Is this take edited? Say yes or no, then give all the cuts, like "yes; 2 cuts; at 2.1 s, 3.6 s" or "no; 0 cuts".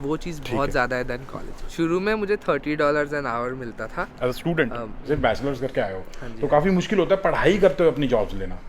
yes; 2 cuts; at 1.7 s, 5.0 s